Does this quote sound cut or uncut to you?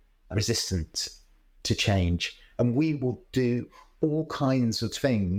uncut